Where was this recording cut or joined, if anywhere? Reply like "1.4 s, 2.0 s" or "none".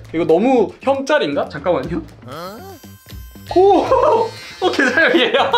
4.4 s